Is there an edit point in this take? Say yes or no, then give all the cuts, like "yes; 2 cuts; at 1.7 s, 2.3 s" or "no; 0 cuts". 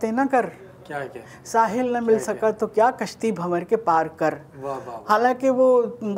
no; 0 cuts